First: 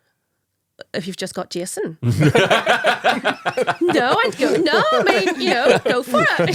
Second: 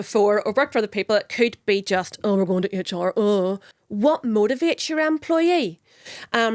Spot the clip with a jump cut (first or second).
second